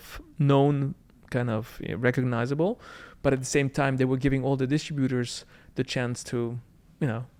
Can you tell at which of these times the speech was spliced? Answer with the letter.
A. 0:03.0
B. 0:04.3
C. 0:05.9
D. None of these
D